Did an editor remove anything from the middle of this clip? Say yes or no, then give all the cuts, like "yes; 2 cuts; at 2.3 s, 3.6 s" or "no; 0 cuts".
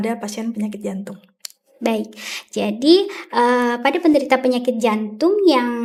no; 0 cuts